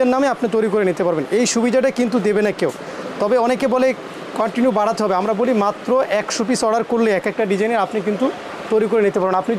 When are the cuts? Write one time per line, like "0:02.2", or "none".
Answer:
none